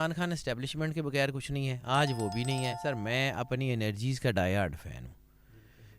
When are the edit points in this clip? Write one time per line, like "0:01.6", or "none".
0:02.8

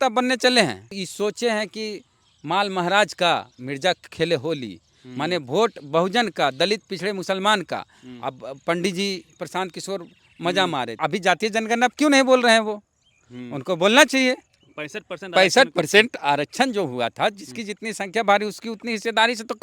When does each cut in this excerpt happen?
0:01.0
0:11.0

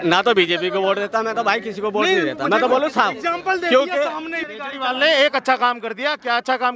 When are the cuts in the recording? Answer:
0:04.4

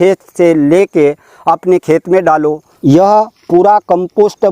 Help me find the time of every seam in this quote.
0:02.7

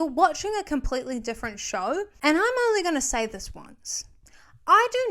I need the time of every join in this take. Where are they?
0:02.1

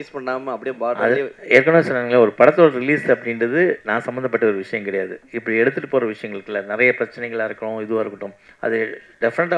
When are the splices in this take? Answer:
none

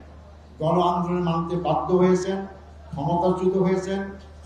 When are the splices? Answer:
none

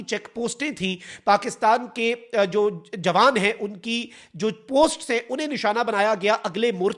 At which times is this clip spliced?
none

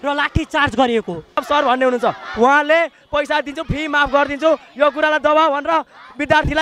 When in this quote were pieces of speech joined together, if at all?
0:01.4

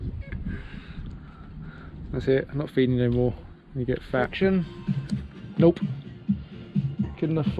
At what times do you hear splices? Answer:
0:04.3

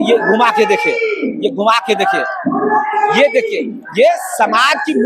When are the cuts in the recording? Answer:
none

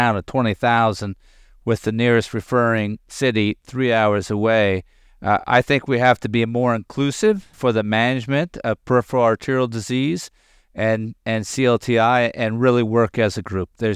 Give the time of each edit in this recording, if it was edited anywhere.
0:07.5

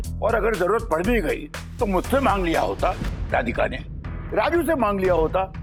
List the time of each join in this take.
none

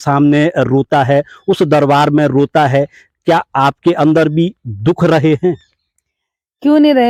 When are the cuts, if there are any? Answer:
none

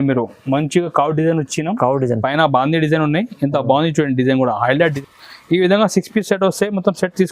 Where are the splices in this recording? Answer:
0:04.8

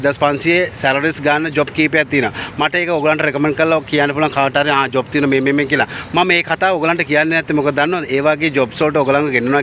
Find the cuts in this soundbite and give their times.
none

